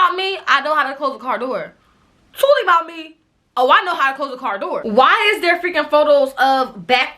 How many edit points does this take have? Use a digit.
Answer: 1